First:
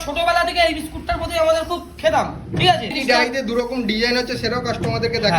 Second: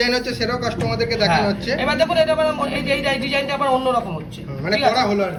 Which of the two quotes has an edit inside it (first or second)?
first